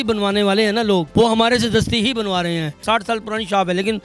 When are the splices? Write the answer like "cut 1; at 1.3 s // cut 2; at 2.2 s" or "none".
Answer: cut 1; at 1.1 s // cut 2; at 2.8 s